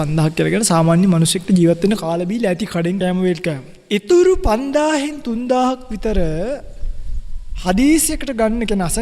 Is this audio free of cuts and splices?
no; 2 cuts; at 3.0 s, 3.7 s

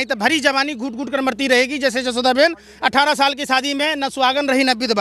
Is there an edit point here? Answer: no; 0 cuts

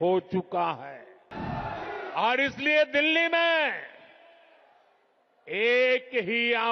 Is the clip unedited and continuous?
no; 1 cut; at 1.3 s

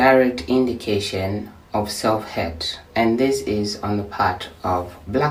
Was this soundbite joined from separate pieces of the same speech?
no; 0 cuts

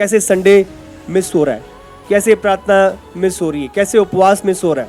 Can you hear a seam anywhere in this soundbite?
no; 0 cuts

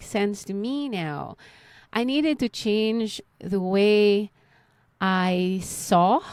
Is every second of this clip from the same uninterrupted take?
yes; 0 cuts

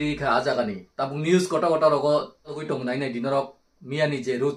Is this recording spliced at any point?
yes; 1 cut; at 2.6 s

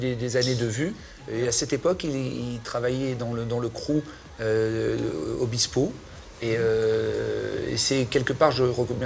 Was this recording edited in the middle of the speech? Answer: no; 0 cuts

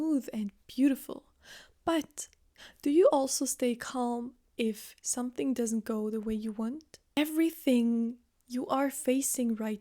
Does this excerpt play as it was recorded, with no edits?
no; 1 cut; at 7.0 s

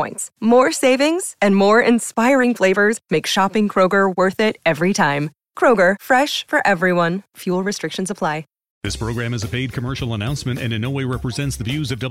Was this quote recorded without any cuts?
no; 1 cut; at 8.9 s

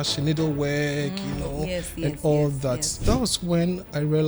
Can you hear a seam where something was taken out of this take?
yes; 1 cut; at 3.0 s

